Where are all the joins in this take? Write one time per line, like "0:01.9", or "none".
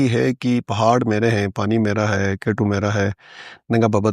none